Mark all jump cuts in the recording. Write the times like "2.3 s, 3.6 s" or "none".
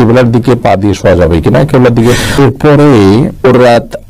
2.2 s